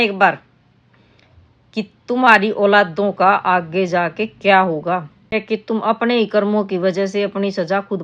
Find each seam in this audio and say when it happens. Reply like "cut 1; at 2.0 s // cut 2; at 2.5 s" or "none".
cut 1; at 5.4 s